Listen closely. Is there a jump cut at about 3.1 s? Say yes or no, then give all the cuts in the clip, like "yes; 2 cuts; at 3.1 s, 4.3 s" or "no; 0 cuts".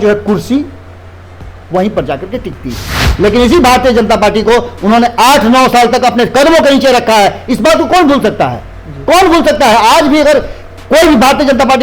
yes; 1 cut; at 3.1 s